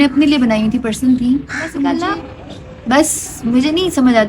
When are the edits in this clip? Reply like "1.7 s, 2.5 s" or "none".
2.0 s